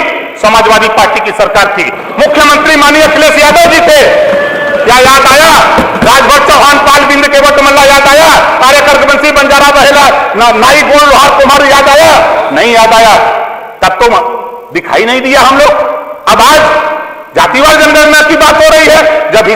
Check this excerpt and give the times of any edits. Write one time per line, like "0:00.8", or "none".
none

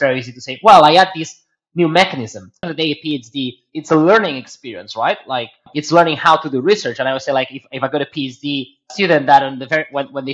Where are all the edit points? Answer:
0:02.7

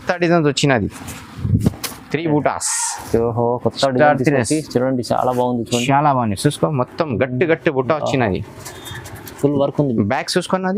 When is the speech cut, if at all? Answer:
none

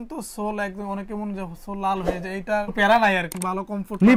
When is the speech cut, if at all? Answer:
none

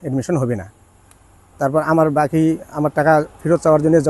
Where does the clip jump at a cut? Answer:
none

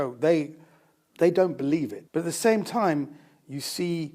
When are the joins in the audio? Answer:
0:02.0

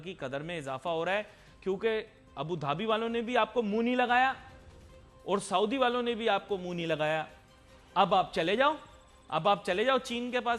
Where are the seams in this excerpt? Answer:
none

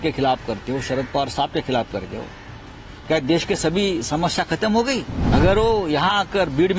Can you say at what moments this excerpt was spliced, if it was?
0:05.1

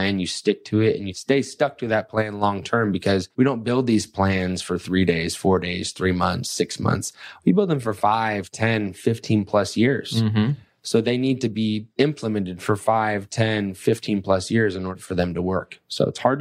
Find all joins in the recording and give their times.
0:01.1
0:03.3
0:11.9
0:14.9

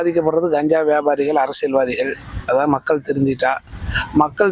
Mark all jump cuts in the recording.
none

